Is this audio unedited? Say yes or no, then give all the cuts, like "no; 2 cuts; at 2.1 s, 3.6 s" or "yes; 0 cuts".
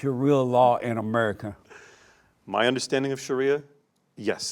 yes; 0 cuts